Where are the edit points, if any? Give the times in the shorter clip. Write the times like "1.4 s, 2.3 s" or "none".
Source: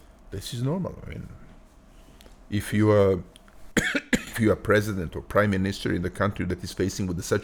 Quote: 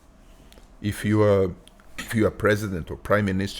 2.0 s